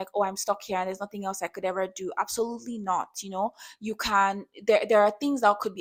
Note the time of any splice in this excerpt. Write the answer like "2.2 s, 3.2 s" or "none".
none

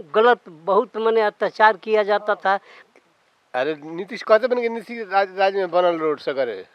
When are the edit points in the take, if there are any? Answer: 2.7 s

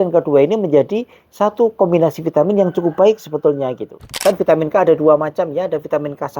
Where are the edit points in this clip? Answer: 4.1 s

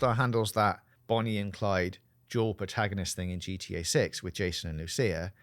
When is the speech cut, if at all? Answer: none

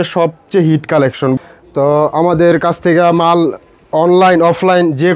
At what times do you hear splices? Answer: 1.4 s

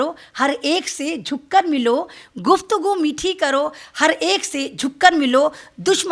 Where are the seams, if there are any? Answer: none

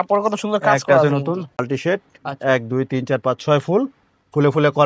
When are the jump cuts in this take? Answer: 1.6 s

